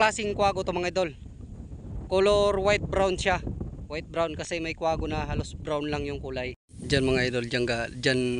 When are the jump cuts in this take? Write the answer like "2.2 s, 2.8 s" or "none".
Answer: 6.7 s